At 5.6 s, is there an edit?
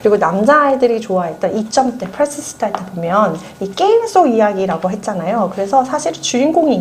no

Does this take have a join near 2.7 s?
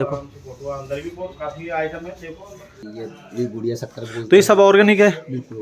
yes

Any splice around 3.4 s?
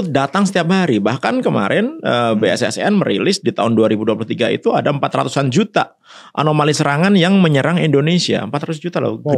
no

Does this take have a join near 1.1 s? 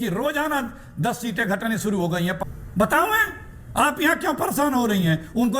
no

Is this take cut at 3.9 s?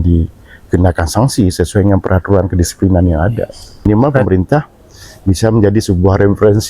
yes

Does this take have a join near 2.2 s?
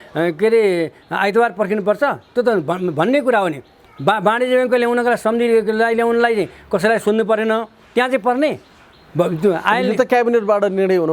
no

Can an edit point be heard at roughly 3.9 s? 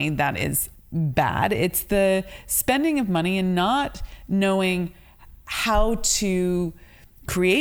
no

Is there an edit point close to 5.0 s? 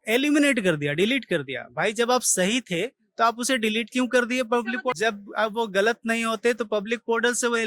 yes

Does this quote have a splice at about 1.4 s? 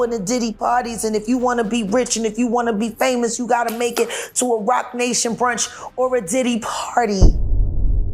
no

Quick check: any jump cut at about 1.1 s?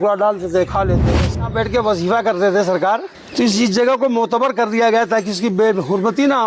yes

